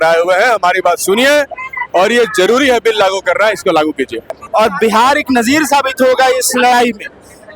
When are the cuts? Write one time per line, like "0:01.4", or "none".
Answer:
0:04.3